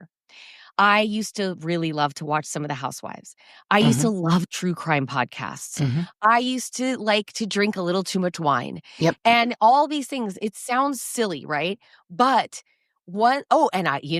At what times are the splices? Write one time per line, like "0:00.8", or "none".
none